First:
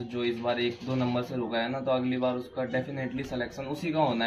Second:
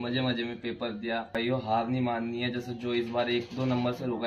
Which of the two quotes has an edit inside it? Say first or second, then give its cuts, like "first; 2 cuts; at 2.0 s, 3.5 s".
second; 1 cut; at 1.3 s